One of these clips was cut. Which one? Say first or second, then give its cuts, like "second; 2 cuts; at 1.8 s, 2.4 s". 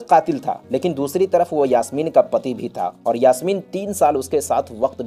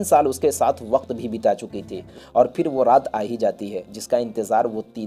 second; 1 cut; at 2.1 s